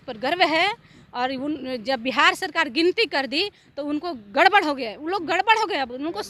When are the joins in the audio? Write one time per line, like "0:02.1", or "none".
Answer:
none